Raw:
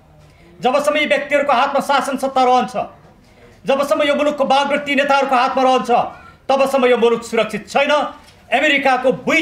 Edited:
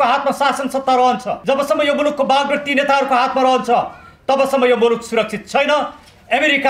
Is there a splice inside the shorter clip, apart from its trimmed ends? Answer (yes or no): yes